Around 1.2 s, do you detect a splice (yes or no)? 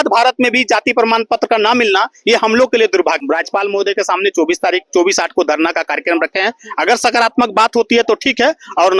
no